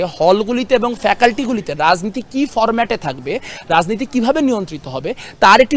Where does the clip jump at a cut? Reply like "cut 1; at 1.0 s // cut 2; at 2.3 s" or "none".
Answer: none